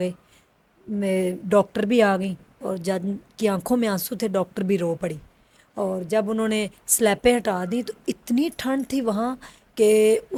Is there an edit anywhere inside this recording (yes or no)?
no